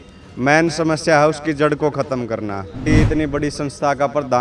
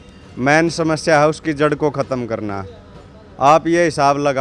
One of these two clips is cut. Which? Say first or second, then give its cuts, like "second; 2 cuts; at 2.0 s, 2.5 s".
first; 1 cut; at 2.9 s